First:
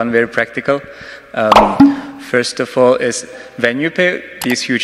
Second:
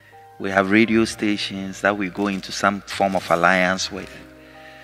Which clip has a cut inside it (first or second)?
first